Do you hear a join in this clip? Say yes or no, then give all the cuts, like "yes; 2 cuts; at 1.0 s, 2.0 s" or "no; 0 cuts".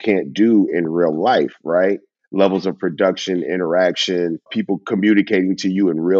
yes; 1 cut; at 4.5 s